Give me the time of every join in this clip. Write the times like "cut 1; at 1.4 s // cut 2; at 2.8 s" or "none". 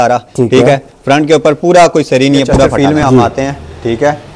cut 1; at 2.7 s

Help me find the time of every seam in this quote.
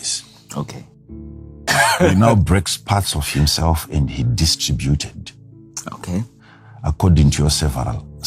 cut 1; at 1.7 s

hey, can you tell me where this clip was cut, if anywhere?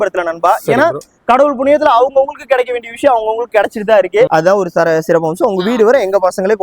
cut 1; at 4.3 s

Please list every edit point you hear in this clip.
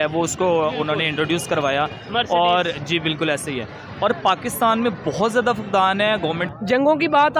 cut 1; at 6.5 s

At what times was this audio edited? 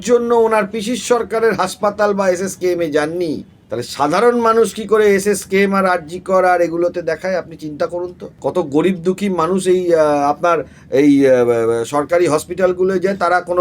cut 1; at 3.6 s // cut 2; at 8.3 s

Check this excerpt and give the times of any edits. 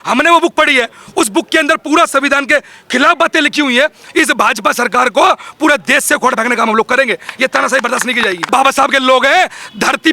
cut 1; at 4.0 s // cut 2; at 8.5 s

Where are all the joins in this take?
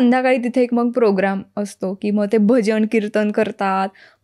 none

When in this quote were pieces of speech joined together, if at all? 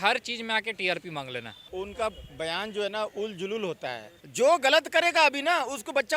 cut 1; at 1.6 s // cut 2; at 4.2 s

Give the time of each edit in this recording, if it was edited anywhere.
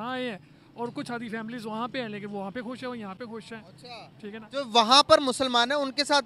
none

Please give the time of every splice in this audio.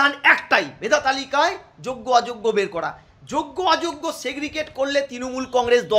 none

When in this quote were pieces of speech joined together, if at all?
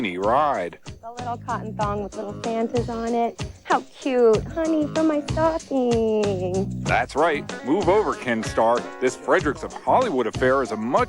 none

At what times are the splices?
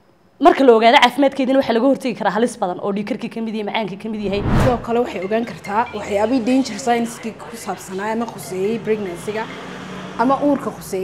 cut 1; at 4.5 s

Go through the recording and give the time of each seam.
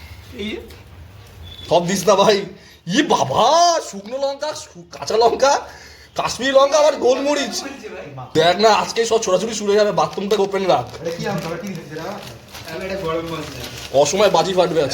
cut 1; at 1.7 s // cut 2; at 8.2 s

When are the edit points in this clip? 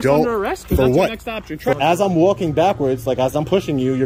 cut 1; at 1.7 s

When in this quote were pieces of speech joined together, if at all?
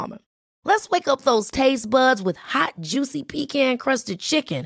none

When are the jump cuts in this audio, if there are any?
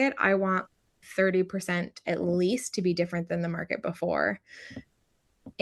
none

